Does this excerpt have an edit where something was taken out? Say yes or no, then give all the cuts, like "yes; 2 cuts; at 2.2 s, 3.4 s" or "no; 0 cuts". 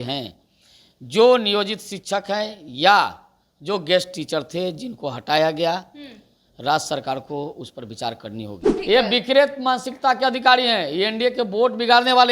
yes; 1 cut; at 8.7 s